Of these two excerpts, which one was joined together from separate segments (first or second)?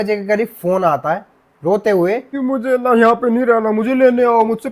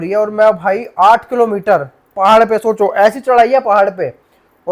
first